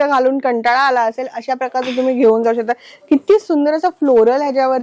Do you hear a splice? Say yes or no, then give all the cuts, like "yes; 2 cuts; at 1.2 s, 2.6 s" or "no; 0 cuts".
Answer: no; 0 cuts